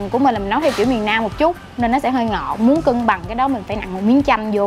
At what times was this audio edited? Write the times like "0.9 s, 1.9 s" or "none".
none